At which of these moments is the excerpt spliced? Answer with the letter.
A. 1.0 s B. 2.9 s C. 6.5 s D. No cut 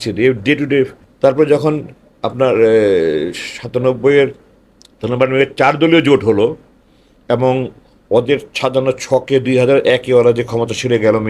A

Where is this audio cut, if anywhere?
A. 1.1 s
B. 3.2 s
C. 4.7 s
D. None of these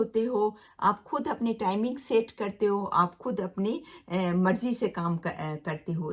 D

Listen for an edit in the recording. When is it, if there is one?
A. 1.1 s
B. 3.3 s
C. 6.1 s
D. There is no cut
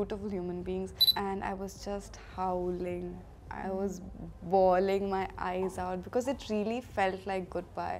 A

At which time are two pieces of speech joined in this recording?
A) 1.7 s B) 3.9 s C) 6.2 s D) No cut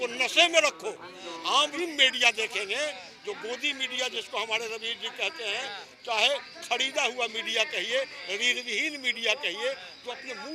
A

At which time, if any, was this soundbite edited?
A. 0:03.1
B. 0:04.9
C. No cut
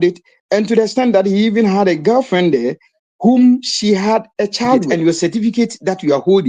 B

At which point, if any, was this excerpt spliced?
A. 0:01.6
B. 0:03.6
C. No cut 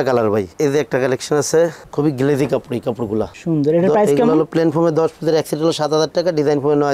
C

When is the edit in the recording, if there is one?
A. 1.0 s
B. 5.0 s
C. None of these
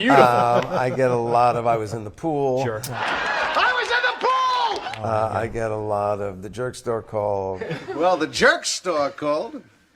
B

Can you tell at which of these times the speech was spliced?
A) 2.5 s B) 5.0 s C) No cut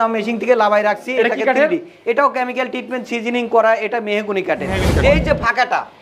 B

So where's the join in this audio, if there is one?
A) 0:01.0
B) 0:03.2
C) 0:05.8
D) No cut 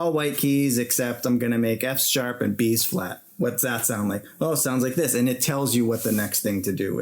D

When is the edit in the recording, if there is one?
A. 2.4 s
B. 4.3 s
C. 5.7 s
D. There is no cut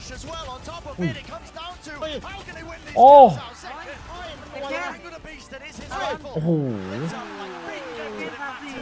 D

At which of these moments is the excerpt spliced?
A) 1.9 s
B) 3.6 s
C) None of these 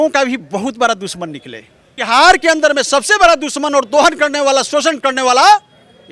A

